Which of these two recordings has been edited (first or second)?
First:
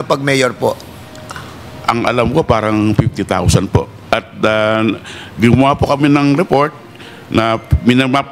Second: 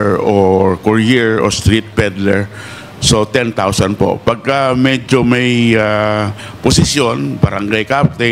first